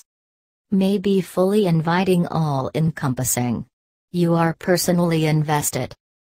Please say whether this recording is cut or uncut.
uncut